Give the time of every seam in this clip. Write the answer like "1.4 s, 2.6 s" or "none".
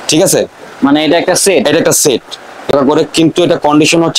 2.7 s